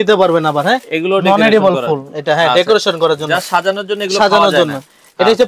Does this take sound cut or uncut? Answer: uncut